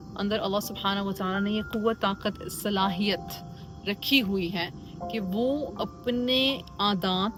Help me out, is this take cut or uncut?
uncut